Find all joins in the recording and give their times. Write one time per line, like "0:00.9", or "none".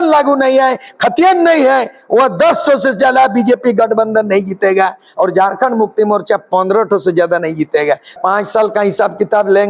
0:08.2